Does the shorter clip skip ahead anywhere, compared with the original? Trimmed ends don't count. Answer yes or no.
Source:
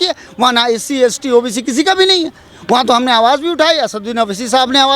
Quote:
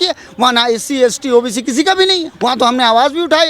yes